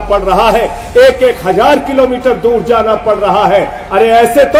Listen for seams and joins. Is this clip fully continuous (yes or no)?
yes